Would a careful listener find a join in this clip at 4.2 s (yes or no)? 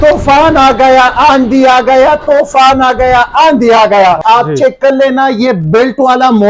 yes